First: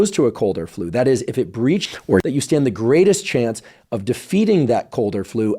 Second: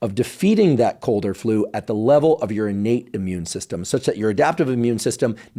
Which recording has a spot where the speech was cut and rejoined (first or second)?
first